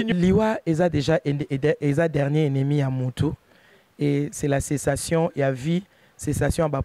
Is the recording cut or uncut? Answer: uncut